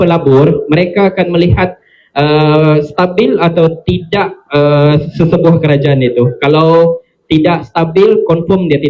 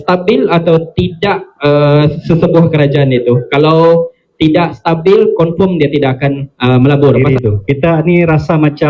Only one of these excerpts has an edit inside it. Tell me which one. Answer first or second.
second